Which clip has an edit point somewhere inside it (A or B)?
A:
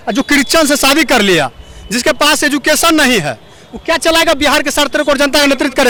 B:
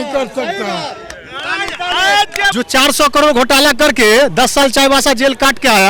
B